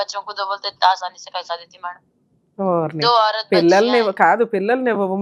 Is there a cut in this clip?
no; 0 cuts

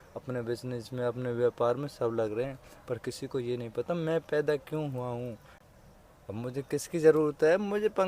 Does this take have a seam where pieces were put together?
yes; 1 cut; at 5.5 s

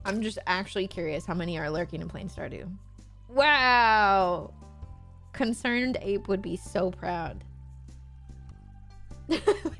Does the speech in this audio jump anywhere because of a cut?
no; 0 cuts

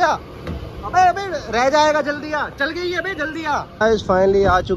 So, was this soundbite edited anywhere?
yes; 1 cut; at 3.7 s

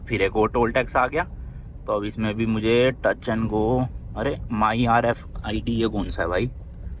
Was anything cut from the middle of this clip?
no; 0 cuts

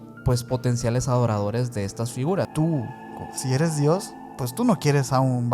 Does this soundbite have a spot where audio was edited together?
yes; 1 cut; at 2.5 s

